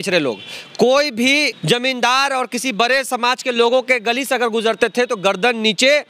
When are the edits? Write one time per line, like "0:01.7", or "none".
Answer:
0:01.5